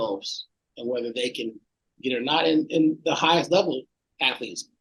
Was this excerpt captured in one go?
yes; 0 cuts

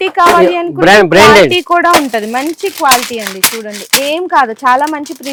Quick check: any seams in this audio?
no; 0 cuts

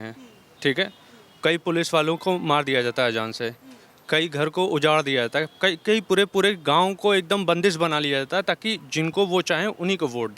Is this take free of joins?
yes; 0 cuts

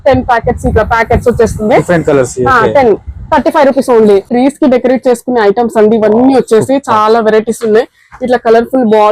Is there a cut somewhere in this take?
yes; 1 cut; at 4.3 s

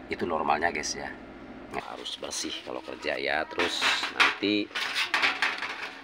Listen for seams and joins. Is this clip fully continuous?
no; 1 cut; at 1.8 s

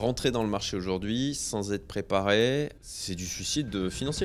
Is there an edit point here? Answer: yes; 1 cut; at 2.8 s

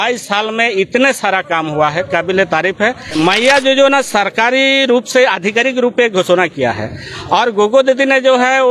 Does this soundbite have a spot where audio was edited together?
yes; 1 cut; at 3.2 s

